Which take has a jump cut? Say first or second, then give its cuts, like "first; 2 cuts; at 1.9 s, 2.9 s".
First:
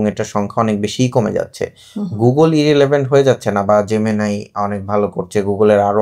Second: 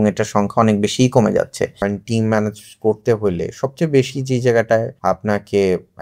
second; 2 cuts; at 1.8 s, 4.9 s